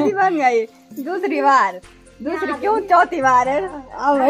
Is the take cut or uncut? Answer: uncut